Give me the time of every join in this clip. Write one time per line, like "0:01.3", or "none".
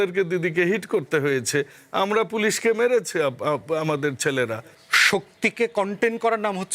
0:04.6